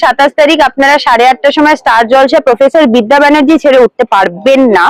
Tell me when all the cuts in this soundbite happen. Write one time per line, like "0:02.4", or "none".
none